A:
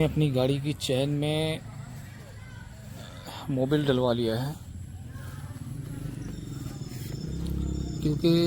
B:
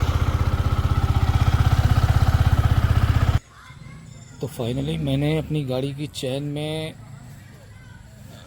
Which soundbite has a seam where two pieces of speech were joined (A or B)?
B